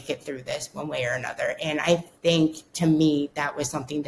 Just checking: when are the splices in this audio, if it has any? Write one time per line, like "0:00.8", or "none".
none